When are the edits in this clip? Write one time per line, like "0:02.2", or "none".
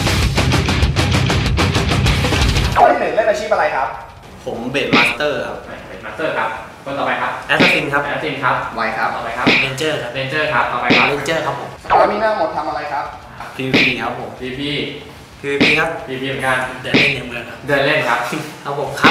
none